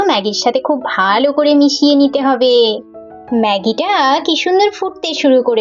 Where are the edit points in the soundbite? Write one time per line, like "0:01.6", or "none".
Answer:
none

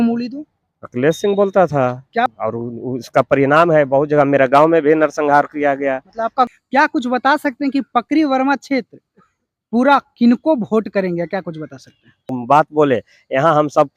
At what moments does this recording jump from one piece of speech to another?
0:02.3
0:06.5
0:12.3

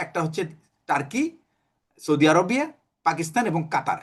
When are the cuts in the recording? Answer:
none

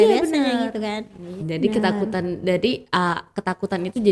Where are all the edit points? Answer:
0:01.4

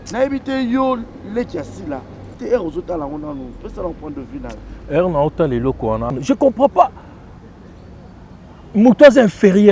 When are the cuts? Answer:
0:02.4
0:06.1

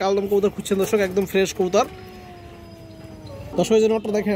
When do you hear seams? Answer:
none

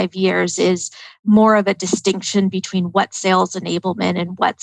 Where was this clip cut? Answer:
0:01.1

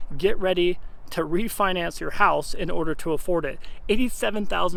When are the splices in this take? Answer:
none

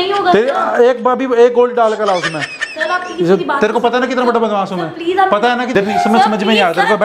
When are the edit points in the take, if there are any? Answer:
0:05.7

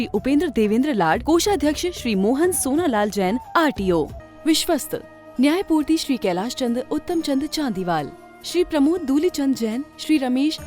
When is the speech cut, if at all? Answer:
0:04.2

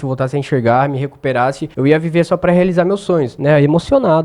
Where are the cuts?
0:01.7
0:03.3

